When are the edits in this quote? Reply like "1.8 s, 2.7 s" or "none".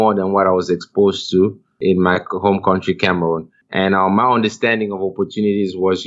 3.6 s